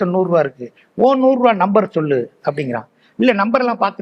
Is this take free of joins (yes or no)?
yes